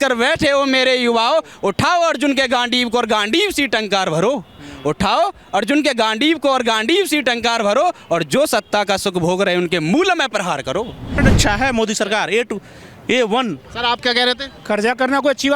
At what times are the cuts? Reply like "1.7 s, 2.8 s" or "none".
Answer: 11.2 s